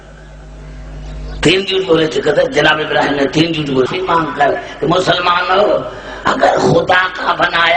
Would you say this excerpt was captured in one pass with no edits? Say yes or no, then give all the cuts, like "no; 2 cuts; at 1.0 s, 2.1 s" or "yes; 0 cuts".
no; 1 cut; at 3.9 s